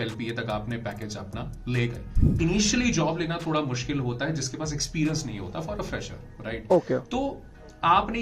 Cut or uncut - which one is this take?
cut